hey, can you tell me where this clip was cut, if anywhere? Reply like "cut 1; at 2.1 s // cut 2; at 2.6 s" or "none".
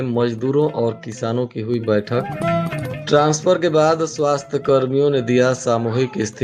none